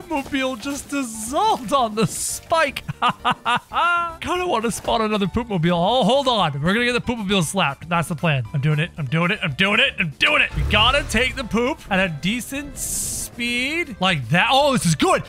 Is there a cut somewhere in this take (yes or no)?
yes